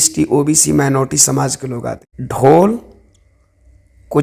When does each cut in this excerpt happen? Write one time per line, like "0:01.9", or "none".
0:02.0